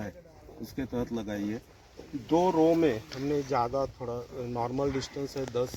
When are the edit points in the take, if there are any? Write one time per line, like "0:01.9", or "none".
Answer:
none